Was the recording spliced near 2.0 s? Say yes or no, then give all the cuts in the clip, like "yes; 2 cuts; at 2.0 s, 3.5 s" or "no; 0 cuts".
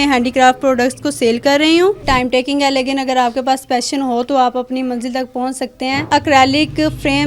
yes; 2 cuts; at 2.0 s, 6.1 s